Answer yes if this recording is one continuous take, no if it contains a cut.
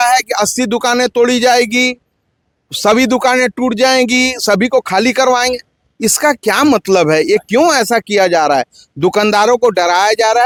yes